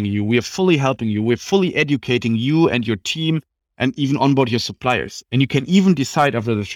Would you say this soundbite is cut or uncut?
uncut